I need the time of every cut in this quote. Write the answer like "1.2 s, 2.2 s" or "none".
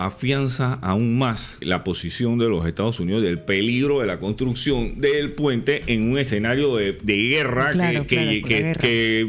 1.6 s